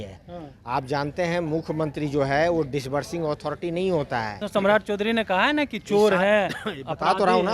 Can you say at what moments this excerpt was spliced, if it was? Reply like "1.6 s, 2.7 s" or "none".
4.5 s